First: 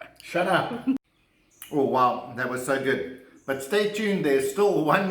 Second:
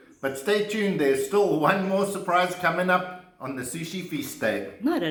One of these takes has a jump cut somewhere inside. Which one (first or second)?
first